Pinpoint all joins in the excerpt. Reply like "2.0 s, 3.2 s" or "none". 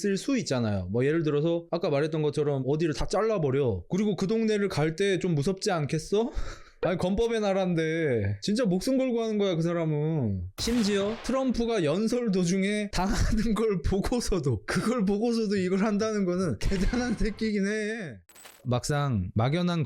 18.3 s